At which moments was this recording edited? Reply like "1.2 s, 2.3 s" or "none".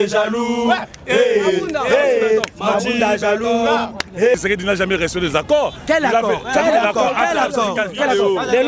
4.3 s